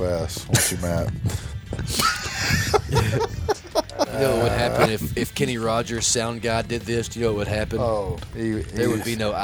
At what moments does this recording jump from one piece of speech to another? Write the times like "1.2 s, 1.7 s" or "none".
4.1 s, 8.2 s